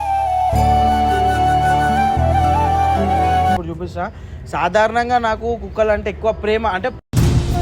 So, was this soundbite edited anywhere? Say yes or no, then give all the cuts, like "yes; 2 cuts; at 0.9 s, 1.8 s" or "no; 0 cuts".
yes; 1 cut; at 3.6 s